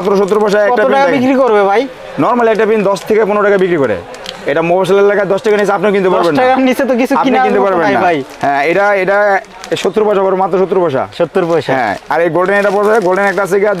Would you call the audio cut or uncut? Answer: uncut